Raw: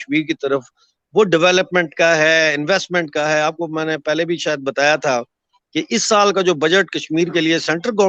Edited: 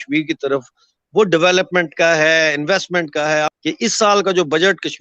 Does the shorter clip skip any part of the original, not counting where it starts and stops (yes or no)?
yes